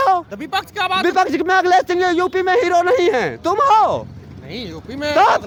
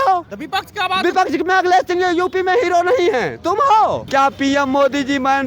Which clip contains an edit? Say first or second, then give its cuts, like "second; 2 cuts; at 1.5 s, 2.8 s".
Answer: second; 1 cut; at 4.0 s